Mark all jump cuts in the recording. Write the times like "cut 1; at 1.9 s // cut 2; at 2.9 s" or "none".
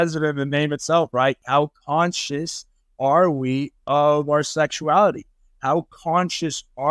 cut 1; at 1.4 s